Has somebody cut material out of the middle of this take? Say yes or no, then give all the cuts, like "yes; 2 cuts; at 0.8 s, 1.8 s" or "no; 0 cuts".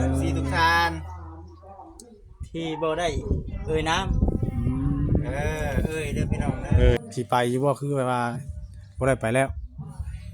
yes; 1 cut; at 7.0 s